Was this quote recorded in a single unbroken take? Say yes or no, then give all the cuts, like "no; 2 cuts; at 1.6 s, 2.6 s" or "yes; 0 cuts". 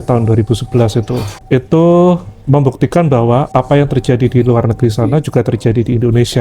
yes; 0 cuts